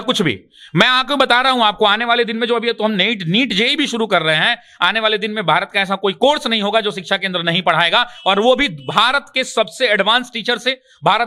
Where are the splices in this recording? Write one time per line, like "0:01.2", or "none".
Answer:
none